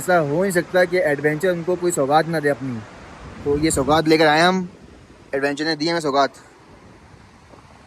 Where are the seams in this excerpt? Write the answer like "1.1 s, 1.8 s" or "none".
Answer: none